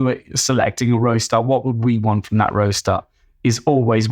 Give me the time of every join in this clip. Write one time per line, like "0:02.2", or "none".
none